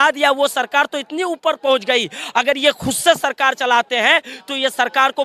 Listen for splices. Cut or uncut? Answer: uncut